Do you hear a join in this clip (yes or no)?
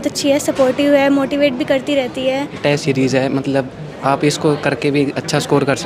yes